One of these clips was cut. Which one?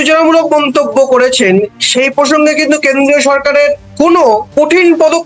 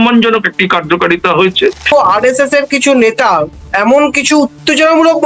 second; 1 cut; at 1.9 s

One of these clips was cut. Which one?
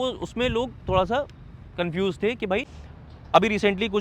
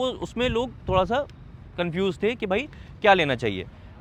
first; 1 cut; at 2.8 s

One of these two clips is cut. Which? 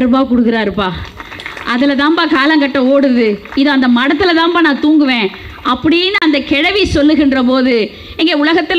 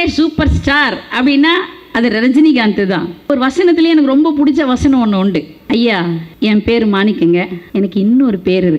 second; 4 cuts; at 3.3 s, 5.5 s, 6.3 s, 7.6 s

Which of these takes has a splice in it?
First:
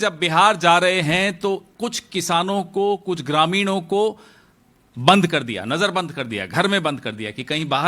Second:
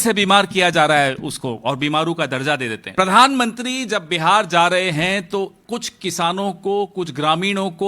second; 1 cut; at 2.8 s

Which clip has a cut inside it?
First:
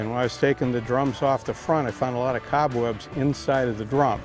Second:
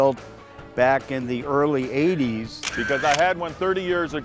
second; 1 cut; at 2.7 s

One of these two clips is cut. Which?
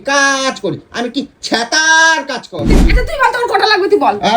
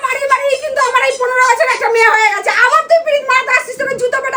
first; 1 cut; at 2.9 s

